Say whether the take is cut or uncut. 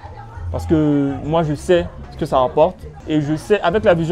cut